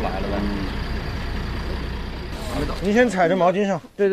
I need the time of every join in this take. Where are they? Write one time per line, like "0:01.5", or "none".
0:02.7